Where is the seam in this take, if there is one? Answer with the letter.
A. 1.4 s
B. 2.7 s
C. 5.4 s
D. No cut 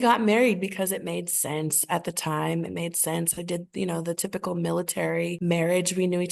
C